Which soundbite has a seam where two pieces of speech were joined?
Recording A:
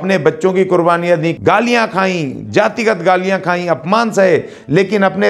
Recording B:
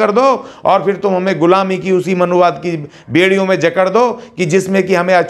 A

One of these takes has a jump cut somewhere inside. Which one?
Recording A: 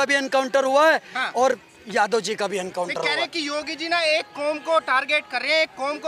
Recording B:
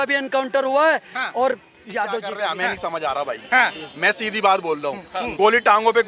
B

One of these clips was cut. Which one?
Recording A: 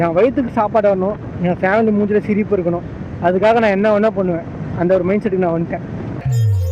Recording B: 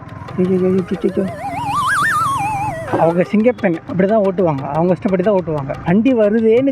B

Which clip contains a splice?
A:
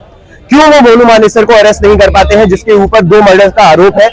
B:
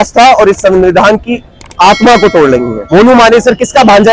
B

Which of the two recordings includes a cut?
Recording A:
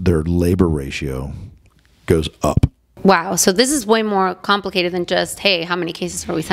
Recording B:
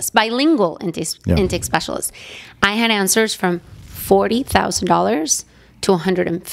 A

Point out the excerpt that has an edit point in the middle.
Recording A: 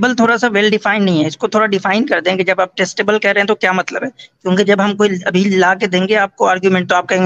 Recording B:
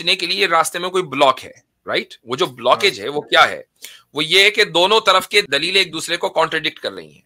B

